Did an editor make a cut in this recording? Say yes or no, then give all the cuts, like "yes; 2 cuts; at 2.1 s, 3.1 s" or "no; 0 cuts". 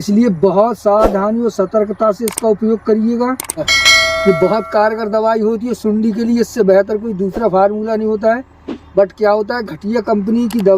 yes; 1 cut; at 3.7 s